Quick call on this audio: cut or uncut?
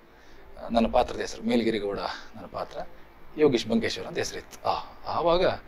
uncut